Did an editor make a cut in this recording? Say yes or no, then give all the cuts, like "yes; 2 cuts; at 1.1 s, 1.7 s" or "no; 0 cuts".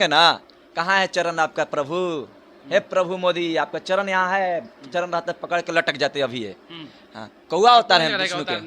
no; 0 cuts